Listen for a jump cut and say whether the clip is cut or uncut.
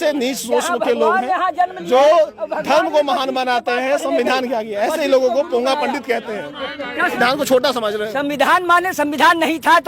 cut